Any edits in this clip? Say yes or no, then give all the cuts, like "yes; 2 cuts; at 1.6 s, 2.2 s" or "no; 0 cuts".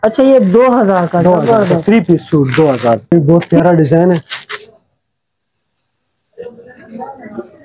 yes; 1 cut; at 3.1 s